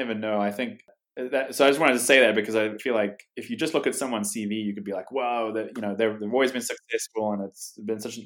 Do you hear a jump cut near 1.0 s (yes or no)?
yes